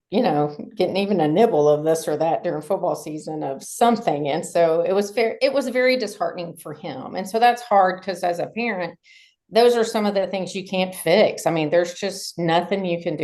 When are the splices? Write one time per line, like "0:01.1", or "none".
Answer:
none